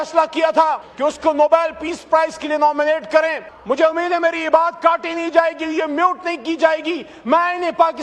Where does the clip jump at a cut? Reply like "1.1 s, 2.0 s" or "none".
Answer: 0.9 s, 3.5 s